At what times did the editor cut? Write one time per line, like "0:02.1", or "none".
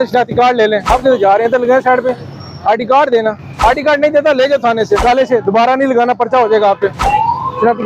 0:00.9
0:03.5
0:05.0
0:07.0

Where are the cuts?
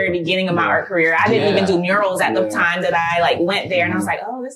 none

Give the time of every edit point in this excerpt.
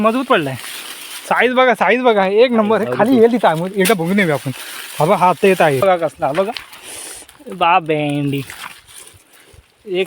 0:05.8

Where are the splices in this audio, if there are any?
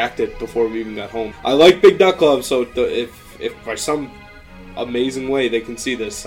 0:01.3

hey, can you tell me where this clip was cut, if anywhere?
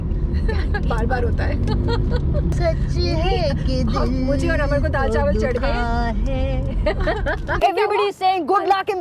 0:02.5
0:07.5

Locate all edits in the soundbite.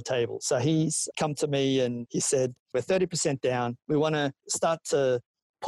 0:01.1
0:02.5

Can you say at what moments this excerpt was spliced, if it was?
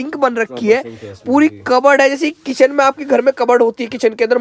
none

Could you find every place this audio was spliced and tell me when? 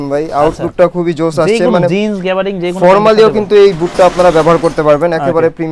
none

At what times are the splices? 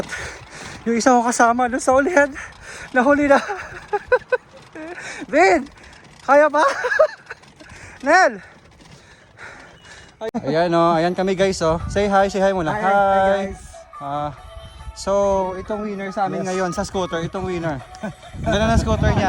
0:10.3

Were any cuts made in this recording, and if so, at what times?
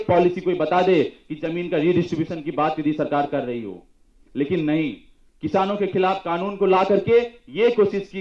none

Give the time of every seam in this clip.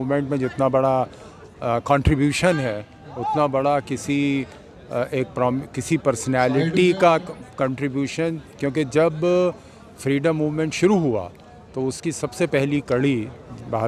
none

